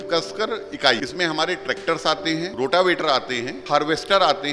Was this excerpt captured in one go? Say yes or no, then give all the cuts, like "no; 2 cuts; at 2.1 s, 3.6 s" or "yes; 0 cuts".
no; 3 cuts; at 1.1 s, 2.5 s, 3.5 s